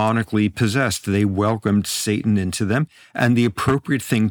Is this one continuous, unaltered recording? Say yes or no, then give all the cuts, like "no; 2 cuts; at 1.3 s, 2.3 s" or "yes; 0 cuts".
yes; 0 cuts